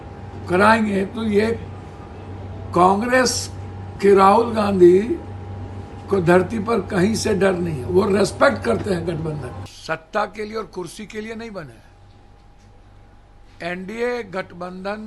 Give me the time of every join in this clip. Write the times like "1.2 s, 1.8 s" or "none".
9.7 s